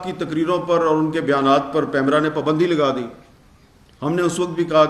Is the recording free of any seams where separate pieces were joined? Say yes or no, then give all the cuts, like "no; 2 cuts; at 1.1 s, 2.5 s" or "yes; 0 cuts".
yes; 0 cuts